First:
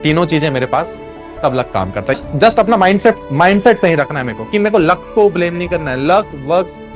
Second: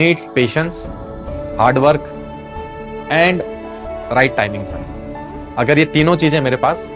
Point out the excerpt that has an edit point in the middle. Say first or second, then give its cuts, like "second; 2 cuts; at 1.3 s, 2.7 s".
first; 2 cuts; at 2.1 s, 3.2 s